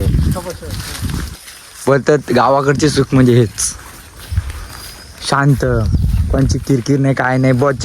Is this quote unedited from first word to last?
no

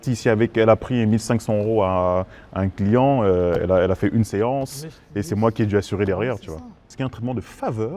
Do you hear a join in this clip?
yes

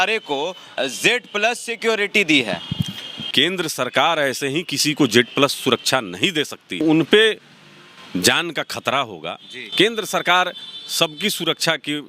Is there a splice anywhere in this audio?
yes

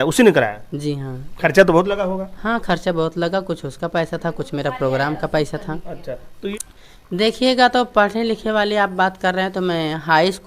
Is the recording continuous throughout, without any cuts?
no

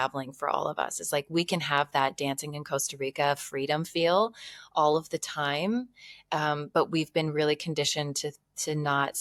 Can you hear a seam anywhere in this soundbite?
no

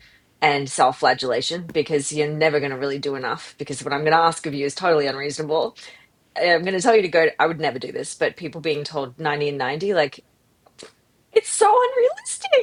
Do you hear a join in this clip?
no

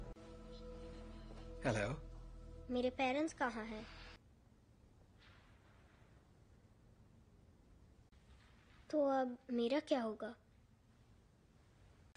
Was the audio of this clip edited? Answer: yes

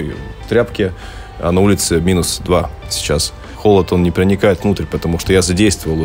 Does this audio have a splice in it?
yes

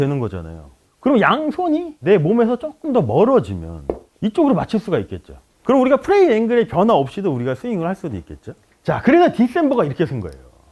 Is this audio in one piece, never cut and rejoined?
yes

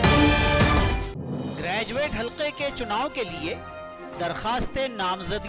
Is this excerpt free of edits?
yes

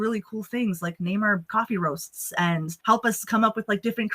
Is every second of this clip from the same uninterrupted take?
no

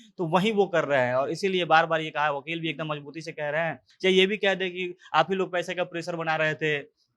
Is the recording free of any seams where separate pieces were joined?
no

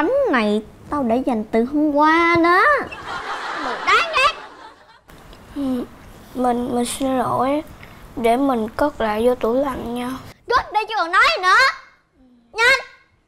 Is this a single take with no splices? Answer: yes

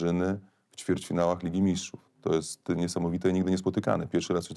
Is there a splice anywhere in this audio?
no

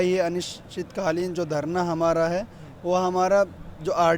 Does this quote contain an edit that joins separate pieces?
no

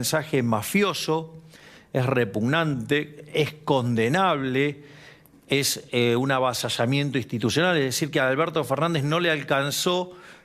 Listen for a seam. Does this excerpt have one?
no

